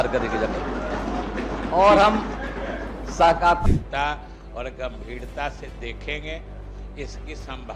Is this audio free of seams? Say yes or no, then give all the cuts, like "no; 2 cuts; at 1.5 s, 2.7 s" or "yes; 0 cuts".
no; 1 cut; at 3.6 s